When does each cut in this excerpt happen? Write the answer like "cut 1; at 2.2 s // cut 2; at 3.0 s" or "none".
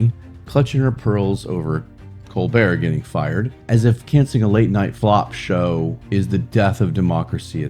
cut 1; at 3.6 s // cut 2; at 4.9 s // cut 3; at 6.0 s